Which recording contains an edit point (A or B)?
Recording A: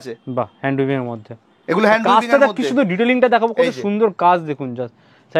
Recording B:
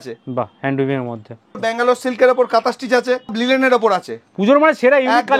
B